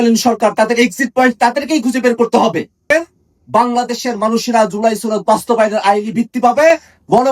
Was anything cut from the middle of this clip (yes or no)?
yes